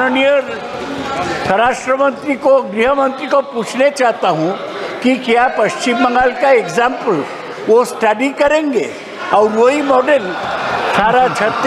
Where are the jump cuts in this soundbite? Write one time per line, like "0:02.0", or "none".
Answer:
none